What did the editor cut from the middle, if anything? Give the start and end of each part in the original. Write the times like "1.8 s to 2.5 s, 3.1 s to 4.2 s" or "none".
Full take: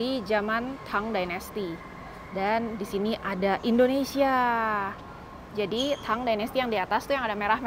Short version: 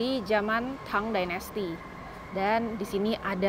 none